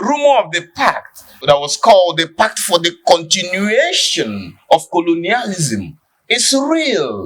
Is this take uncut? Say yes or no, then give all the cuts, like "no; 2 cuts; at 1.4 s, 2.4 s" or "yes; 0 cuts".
no; 1 cut; at 1.3 s